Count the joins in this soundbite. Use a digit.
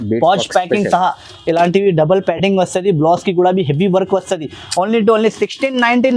0